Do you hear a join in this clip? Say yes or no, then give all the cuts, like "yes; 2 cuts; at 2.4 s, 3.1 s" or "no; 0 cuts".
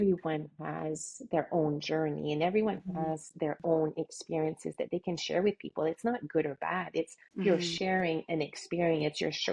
no; 0 cuts